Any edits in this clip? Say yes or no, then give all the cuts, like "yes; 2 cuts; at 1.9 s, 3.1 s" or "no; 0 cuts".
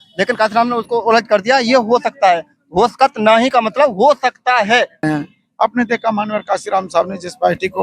yes; 1 cut; at 5.0 s